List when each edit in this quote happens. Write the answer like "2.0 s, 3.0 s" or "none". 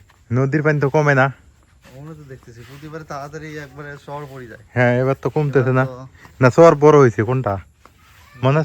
none